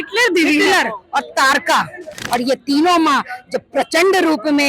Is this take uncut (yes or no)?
no